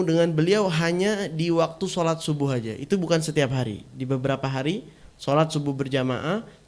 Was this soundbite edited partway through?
no; 0 cuts

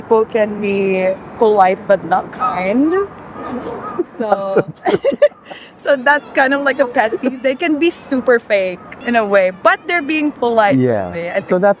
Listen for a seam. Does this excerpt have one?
no; 0 cuts

